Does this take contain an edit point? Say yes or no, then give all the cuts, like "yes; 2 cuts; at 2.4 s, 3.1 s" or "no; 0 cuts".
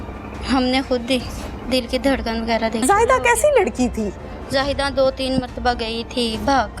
yes; 1 cut; at 2.8 s